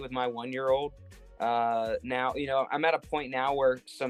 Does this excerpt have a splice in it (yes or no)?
no